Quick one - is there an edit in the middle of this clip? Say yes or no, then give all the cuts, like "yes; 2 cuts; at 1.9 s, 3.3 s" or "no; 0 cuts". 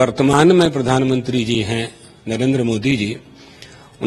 no; 0 cuts